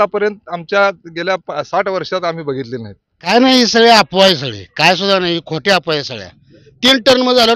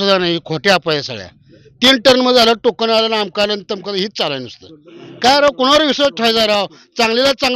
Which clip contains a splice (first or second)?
first